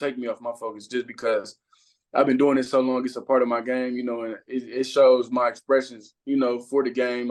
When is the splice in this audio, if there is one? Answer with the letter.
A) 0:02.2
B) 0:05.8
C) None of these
C